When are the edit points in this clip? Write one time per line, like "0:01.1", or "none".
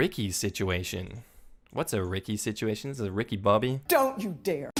none